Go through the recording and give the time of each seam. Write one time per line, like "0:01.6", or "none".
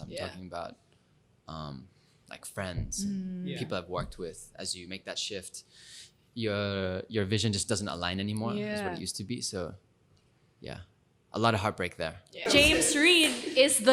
0:12.4